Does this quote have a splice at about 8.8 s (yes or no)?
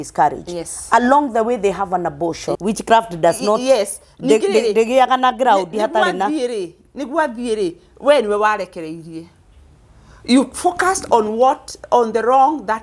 no